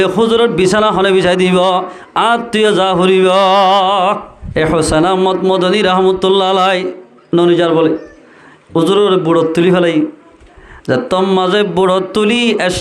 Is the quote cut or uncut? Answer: cut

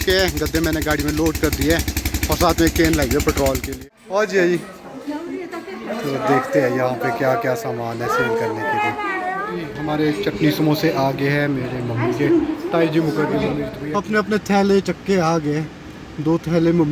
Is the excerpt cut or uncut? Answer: cut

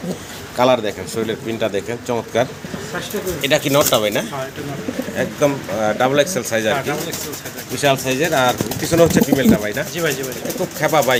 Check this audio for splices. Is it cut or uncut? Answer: uncut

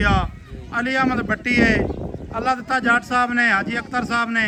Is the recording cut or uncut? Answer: uncut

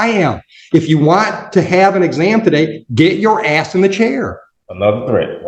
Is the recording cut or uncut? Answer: cut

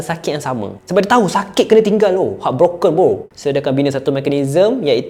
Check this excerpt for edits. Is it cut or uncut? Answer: cut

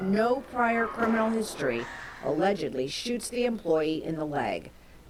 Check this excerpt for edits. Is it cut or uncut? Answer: uncut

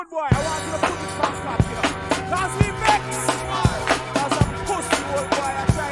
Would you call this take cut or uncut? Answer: uncut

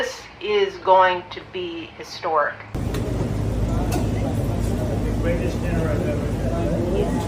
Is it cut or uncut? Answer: cut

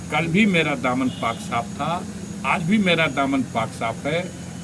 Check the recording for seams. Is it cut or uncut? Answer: uncut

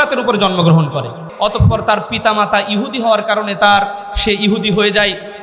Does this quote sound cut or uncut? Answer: cut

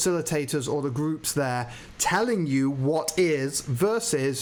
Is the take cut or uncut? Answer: uncut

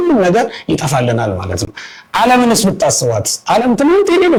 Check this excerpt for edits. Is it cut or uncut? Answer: uncut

